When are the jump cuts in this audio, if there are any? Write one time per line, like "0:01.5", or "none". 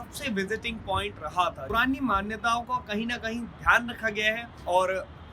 0:01.6